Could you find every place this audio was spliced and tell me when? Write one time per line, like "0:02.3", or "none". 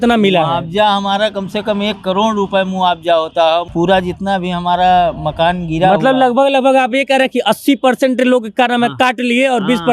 0:03.7